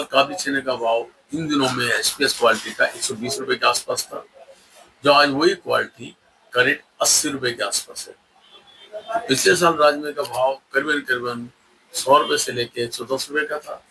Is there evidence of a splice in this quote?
no; 0 cuts

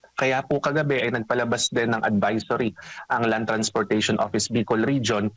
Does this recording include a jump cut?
no; 0 cuts

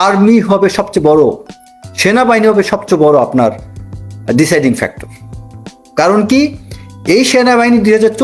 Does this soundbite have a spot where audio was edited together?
no; 0 cuts

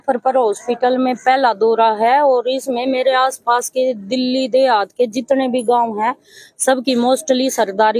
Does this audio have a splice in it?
no; 0 cuts

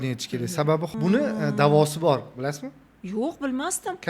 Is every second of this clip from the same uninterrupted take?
no; 1 cut; at 0.9 s

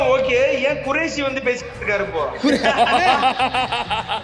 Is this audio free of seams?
yes; 0 cuts

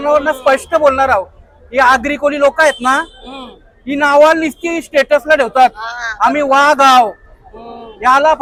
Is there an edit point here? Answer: no; 0 cuts

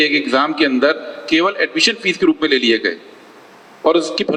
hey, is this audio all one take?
yes; 0 cuts

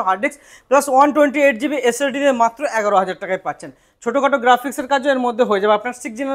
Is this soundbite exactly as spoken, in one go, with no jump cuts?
yes; 0 cuts

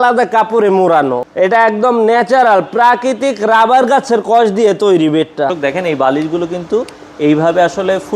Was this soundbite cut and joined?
yes; 2 cuts; at 1.2 s, 5.5 s

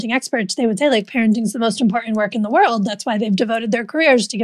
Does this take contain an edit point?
no; 0 cuts

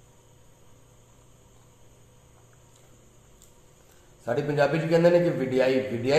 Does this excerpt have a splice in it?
no; 0 cuts

